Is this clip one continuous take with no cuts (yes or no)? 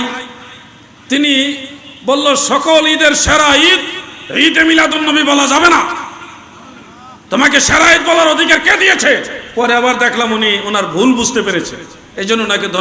yes